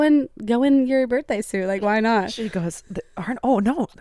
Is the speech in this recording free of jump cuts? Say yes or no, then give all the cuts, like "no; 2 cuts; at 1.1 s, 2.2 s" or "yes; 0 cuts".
yes; 0 cuts